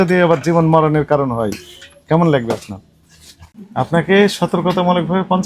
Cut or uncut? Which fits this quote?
cut